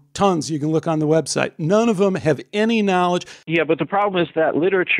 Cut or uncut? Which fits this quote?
cut